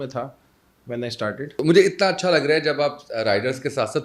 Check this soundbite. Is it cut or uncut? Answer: cut